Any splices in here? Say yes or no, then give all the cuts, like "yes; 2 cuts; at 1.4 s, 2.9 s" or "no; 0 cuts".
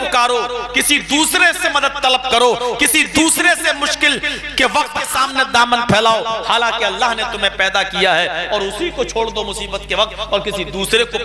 yes; 1 cut; at 5.0 s